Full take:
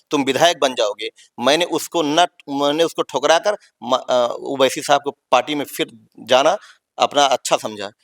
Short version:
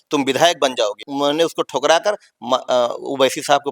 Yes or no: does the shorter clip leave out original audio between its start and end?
yes